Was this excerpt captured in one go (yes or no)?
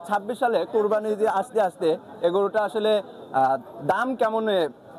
yes